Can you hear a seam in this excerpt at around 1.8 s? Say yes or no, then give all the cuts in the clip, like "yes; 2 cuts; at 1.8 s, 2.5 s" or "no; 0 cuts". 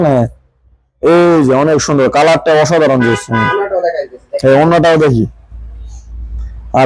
no; 0 cuts